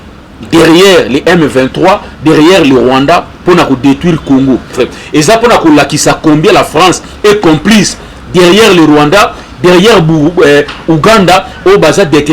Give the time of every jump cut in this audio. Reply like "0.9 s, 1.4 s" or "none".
4.7 s